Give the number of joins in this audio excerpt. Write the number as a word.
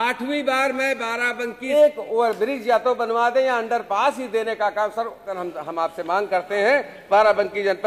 two